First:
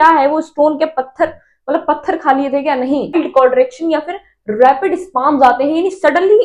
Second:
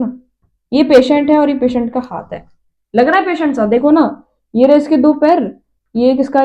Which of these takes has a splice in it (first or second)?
first